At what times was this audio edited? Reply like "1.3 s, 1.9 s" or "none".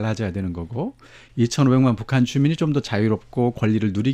none